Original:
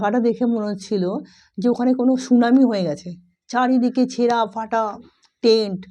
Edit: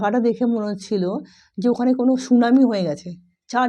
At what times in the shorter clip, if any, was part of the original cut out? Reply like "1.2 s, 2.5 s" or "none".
none